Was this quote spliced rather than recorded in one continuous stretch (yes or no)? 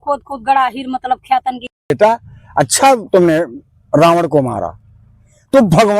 yes